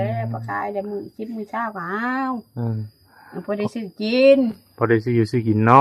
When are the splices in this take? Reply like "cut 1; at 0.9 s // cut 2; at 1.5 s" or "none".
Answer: none

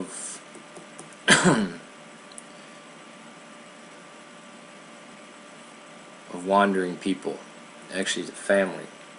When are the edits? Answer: none

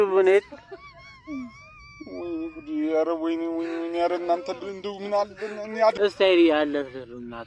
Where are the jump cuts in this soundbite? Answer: cut 1; at 6.0 s

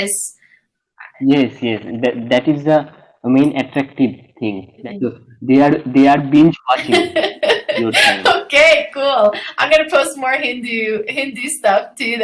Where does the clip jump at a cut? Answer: cut 1; at 4.8 s

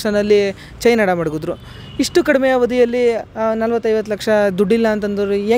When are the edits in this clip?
none

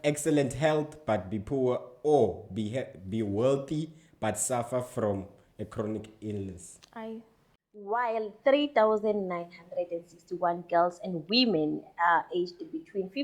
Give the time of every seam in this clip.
cut 1; at 7.9 s

